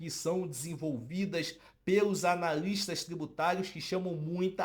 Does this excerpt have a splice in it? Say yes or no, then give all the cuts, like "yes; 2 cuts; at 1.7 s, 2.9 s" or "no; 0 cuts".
no; 0 cuts